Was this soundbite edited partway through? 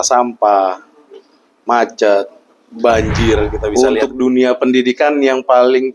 yes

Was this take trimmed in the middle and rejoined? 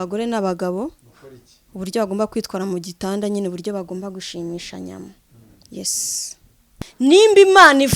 yes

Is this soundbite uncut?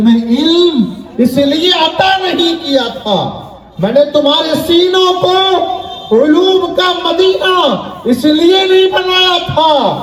yes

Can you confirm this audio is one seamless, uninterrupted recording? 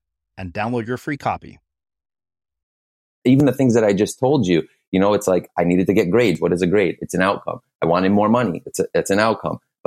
no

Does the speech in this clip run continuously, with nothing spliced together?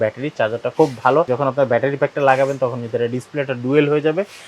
no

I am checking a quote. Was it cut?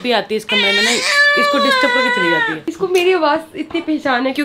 no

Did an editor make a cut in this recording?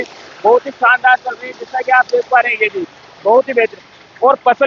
no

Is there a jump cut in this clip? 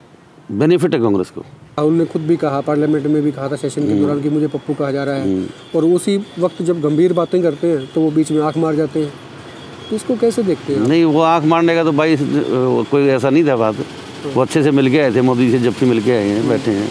yes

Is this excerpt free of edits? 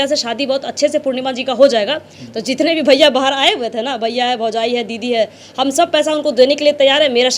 yes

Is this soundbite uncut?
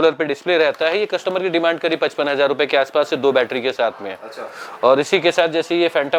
yes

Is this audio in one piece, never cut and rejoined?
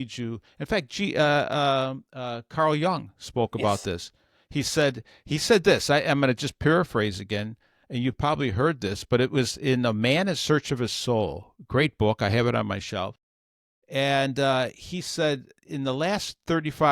yes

